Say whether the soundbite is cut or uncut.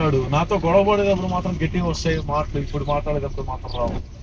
uncut